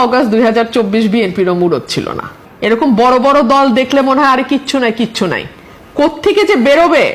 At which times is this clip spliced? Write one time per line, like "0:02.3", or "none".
none